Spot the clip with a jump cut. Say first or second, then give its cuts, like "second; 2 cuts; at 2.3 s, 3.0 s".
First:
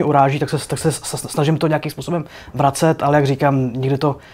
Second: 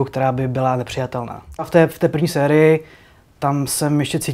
second; 1 cut; at 1.7 s